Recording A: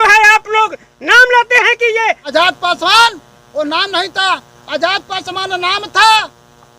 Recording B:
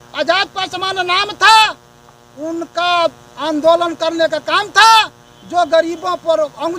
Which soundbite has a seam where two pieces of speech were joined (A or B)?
A